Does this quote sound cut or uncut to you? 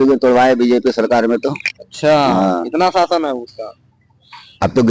uncut